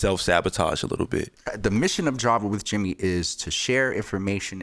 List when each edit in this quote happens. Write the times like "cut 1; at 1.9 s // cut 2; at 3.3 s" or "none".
cut 1; at 1.5 s